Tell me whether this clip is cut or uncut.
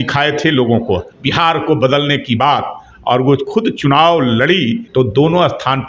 cut